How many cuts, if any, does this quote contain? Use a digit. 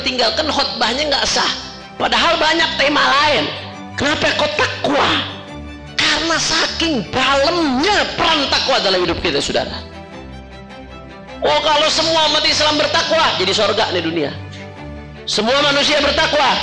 0